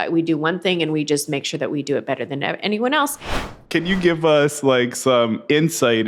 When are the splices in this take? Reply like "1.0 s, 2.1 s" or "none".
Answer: 3.6 s